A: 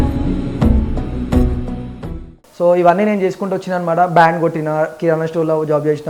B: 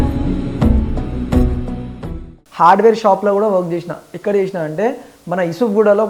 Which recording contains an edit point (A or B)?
A